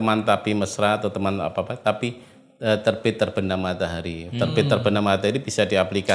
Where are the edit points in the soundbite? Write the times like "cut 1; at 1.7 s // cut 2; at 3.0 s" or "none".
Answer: none